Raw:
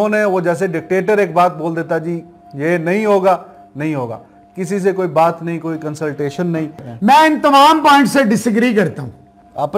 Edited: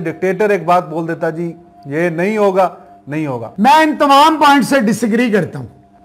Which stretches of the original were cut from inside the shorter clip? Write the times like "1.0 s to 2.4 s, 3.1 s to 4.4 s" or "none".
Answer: 4.1 s to 6.9 s